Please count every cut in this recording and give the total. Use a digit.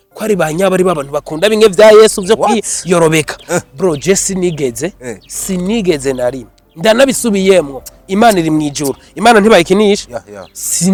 0